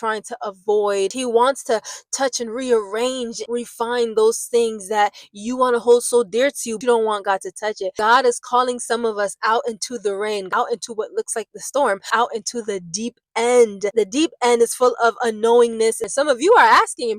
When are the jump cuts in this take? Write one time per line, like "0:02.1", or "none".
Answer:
0:01.2
0:03.4
0:06.7
0:07.9
0:10.5
0:12.1
0:13.9
0:16.1